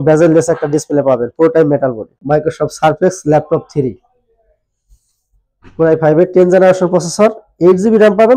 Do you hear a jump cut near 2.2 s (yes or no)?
yes